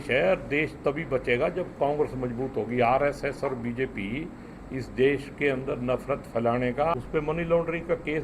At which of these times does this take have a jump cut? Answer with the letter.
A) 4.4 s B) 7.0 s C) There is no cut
B